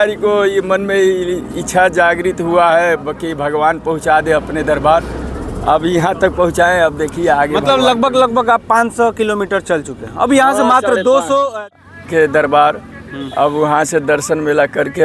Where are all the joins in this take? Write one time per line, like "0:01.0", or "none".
0:11.9

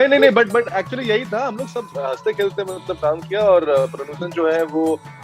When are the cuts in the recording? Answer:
none

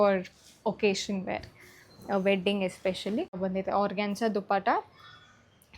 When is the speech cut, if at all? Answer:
0:03.4

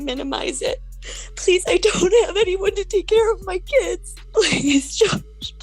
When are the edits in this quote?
0:00.9
0:04.1

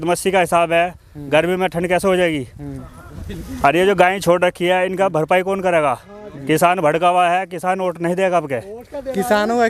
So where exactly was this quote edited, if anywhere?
none

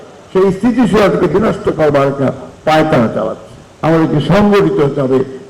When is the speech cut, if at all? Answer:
0:03.7

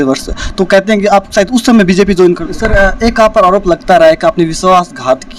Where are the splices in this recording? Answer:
0:02.5

